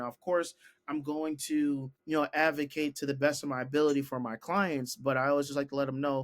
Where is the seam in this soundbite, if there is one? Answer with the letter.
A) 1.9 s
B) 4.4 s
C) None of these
A